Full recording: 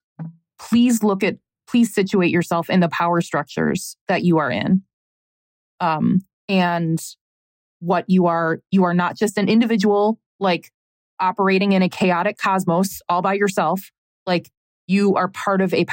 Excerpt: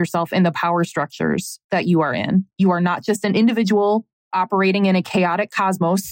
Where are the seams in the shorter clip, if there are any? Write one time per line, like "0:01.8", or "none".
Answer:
0:02.5
0:04.1